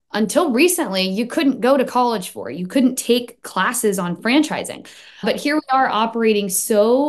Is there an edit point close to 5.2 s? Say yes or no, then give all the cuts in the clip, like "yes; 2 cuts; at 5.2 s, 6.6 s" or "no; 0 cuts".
yes; 1 cut; at 5.2 s